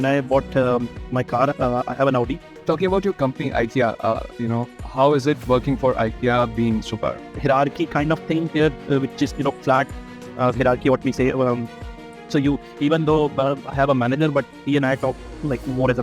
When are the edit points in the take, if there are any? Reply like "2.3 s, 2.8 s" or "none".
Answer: 2.6 s, 7.3 s

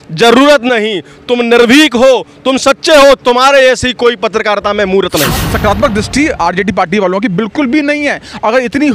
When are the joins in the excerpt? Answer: 5.5 s

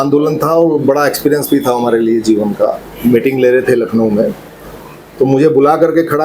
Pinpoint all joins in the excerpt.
2.9 s

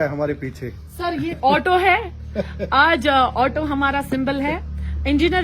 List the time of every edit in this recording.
1.4 s

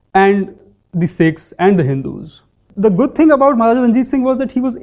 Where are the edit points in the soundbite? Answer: 2.6 s

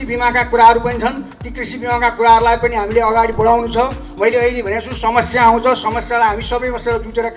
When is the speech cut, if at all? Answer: none

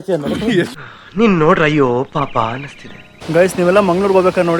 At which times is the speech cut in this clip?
3.1 s

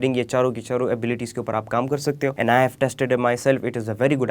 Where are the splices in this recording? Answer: 2.4 s

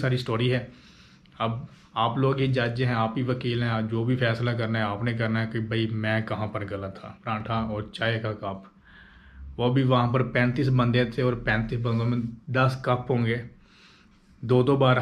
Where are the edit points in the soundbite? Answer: 7.2 s

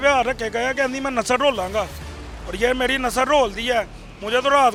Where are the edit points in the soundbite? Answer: none

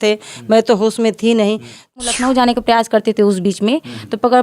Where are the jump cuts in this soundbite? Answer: 1.9 s

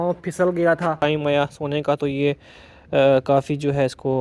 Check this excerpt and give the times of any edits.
1.0 s

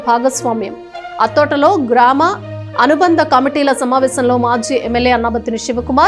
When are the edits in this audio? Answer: none

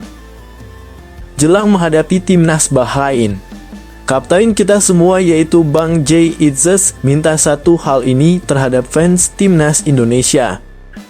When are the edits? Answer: 1.3 s

